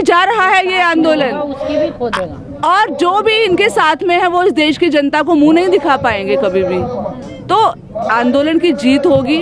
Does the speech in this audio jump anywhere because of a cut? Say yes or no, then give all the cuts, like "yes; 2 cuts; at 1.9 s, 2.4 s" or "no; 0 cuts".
no; 0 cuts